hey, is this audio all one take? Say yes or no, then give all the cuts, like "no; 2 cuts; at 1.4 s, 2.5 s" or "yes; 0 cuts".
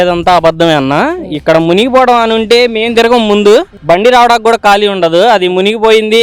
yes; 0 cuts